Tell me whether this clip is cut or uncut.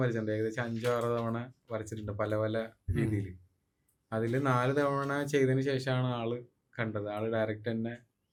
uncut